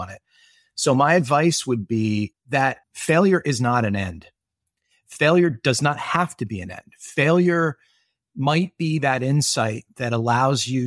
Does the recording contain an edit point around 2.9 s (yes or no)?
yes